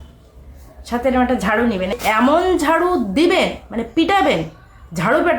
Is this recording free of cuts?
no; 1 cut; at 2.0 s

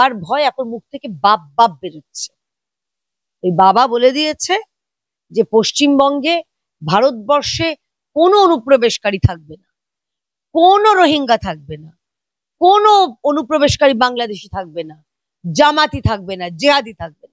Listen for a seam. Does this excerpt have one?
no; 0 cuts

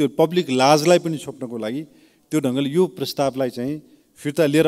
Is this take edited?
no; 0 cuts

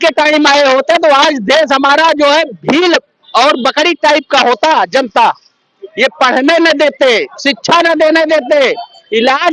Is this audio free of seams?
yes; 0 cuts

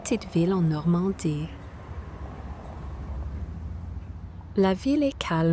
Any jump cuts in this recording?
yes; 1 cut; at 4.5 s

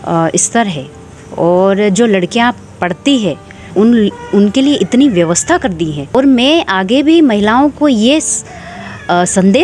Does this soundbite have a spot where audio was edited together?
yes; 2 cuts; at 3.7 s, 6.1 s

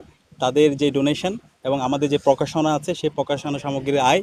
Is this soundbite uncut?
yes; 0 cuts

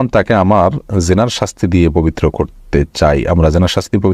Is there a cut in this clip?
no; 0 cuts

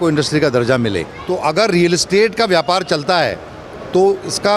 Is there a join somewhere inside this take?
yes; 1 cut; at 1.1 s

